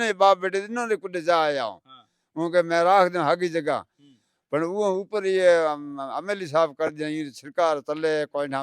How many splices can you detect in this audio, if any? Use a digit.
0